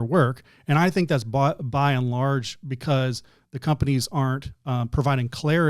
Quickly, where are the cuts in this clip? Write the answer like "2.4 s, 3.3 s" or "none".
none